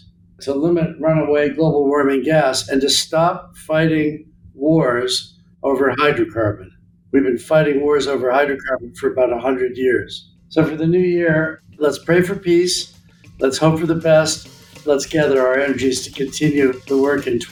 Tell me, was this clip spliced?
no; 0 cuts

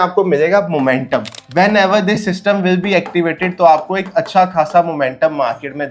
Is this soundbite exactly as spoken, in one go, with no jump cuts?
no; 1 cut; at 1.4 s

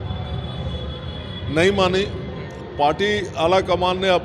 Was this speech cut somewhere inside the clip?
no; 0 cuts

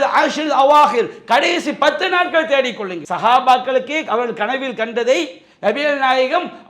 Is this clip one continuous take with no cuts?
no; 1 cut; at 3.0 s

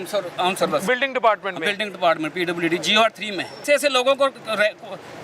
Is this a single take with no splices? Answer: no; 1 cut; at 3.6 s

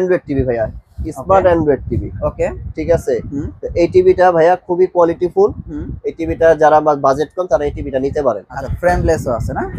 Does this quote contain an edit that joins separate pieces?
yes; 1 cut; at 8.5 s

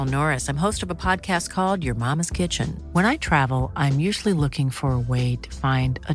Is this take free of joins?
yes; 0 cuts

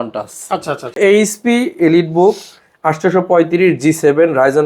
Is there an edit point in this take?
yes; 1 cut; at 1.0 s

